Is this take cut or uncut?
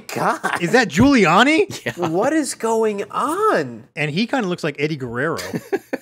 cut